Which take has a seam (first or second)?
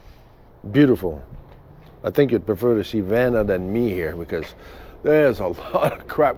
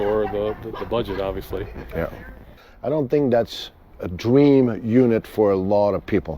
second